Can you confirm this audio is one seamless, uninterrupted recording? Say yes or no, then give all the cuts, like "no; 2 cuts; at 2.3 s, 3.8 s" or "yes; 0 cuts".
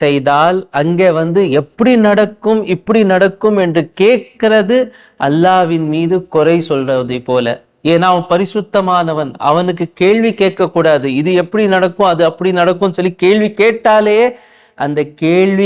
yes; 0 cuts